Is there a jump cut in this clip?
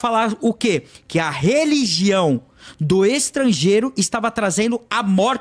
no; 0 cuts

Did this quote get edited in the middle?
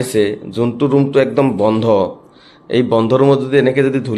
no; 0 cuts

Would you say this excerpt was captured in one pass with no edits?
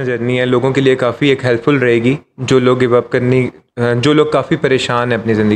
yes; 0 cuts

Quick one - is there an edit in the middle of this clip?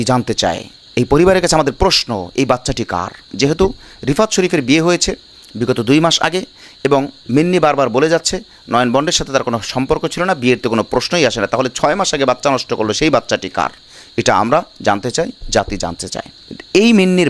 yes; 1 cut; at 16.3 s

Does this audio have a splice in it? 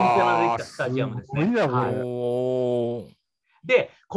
no; 0 cuts

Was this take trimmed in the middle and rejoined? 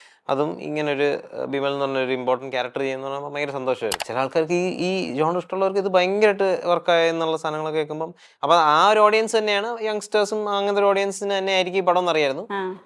yes; 1 cut; at 4.0 s

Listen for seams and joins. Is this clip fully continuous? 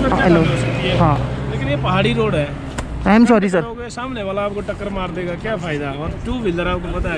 yes; 0 cuts

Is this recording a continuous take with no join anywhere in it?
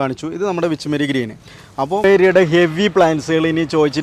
no; 1 cut; at 2.0 s

